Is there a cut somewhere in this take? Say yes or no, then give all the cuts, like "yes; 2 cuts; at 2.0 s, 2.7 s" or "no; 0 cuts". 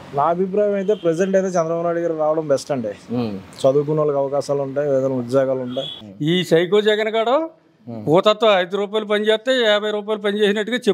yes; 1 cut; at 5.8 s